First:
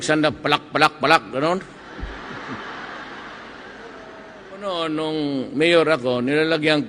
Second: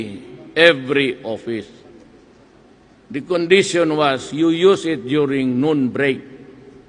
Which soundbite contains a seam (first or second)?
first